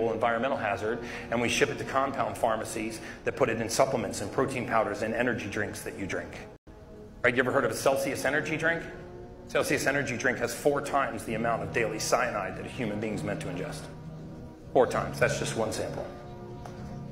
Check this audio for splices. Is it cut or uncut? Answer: uncut